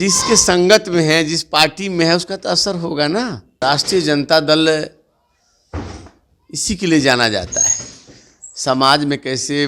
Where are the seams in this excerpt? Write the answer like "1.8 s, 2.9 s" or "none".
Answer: 3.6 s